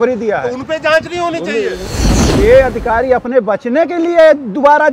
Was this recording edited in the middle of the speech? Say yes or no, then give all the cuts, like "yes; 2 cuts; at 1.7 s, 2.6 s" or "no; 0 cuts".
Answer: yes; 1 cut; at 2.0 s